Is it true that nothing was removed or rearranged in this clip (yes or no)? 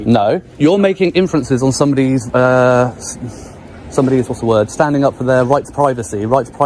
yes